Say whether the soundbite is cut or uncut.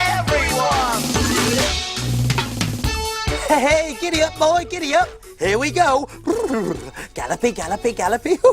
cut